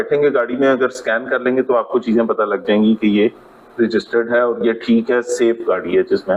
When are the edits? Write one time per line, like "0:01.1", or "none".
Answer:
none